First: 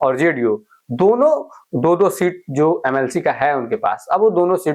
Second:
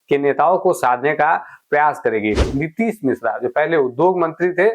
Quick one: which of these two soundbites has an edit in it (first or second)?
second